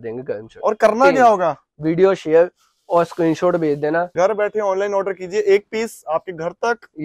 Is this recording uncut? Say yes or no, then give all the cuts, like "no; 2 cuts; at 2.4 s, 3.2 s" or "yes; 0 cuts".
no; 1 cut; at 4.1 s